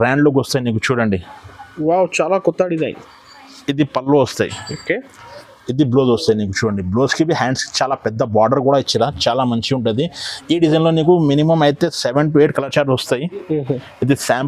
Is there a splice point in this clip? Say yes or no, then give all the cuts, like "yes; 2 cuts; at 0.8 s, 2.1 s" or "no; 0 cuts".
no; 0 cuts